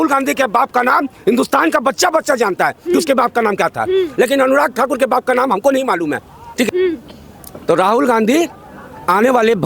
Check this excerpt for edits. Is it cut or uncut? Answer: cut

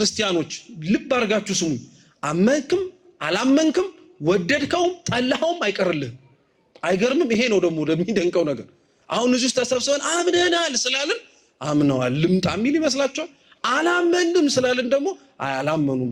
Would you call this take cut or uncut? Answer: uncut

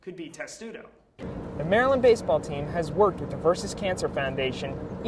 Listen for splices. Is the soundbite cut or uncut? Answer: cut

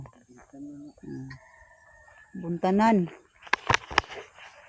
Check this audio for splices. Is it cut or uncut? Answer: uncut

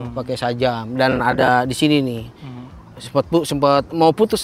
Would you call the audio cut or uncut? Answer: uncut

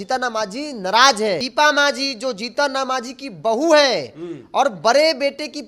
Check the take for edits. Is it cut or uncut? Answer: cut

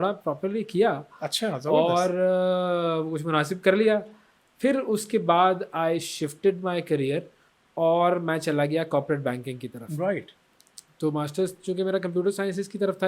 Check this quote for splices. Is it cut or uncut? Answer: uncut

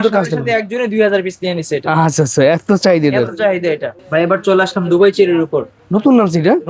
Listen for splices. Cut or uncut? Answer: cut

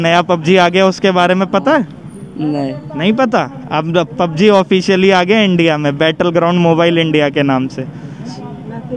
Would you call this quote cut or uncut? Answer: uncut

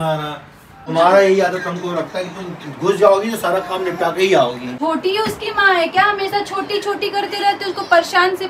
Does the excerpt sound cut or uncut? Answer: cut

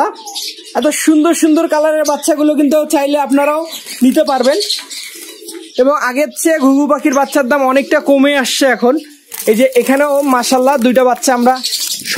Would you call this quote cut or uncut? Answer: uncut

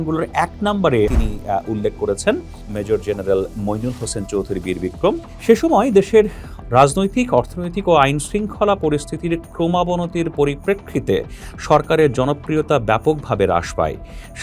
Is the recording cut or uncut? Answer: cut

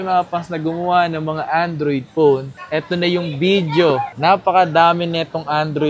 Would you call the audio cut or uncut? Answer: uncut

